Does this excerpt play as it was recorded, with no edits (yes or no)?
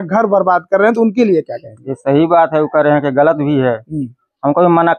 yes